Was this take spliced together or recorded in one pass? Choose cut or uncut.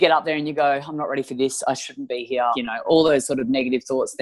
cut